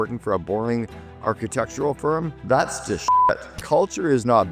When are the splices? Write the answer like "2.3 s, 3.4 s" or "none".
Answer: 2.3 s, 3.5 s